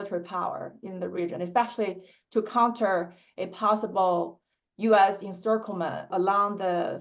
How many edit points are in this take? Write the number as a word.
one